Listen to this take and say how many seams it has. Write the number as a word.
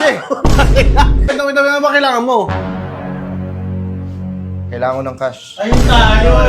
one